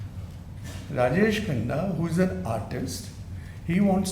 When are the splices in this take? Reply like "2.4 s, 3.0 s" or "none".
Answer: none